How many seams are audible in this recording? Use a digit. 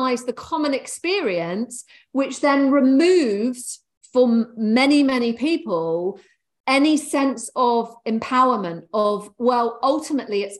0